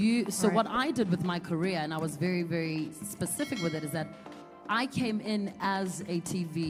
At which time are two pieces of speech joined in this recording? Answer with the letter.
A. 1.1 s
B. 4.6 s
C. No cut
C